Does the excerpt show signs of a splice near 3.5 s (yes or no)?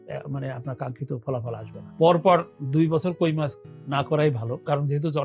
no